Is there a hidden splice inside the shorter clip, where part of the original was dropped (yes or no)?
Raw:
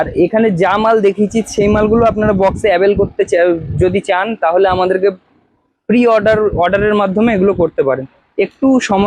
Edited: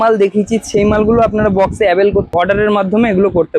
yes